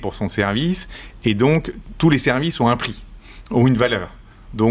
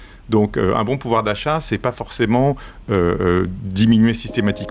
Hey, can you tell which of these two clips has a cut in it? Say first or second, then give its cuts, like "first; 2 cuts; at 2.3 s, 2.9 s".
first; 1 cut; at 1.8 s